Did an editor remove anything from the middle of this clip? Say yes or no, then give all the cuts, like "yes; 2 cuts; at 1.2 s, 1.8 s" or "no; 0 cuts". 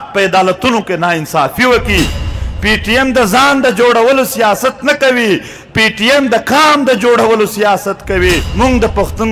yes; 2 cuts; at 2.2 s, 8.5 s